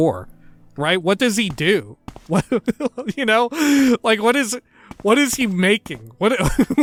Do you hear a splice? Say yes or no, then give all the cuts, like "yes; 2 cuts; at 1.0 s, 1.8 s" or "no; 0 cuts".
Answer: no; 0 cuts